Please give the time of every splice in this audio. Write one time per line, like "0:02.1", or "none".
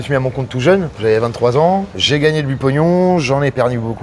0:00.9